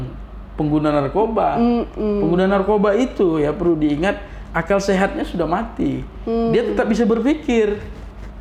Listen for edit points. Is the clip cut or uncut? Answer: uncut